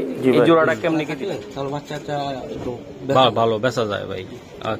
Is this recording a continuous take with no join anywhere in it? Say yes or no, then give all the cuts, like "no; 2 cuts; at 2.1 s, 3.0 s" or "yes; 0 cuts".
no; 1 cut; at 1.1 s